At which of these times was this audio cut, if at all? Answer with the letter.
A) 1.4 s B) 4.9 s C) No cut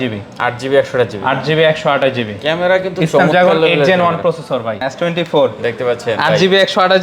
B